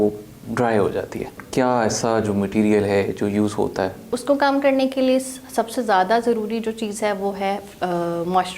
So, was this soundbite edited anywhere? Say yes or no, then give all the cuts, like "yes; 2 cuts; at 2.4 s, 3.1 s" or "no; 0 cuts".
yes; 2 cuts; at 1.4 s, 4.1 s